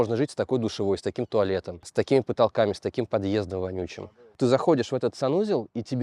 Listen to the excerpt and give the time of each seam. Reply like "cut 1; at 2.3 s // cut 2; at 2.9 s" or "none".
cut 1; at 4.3 s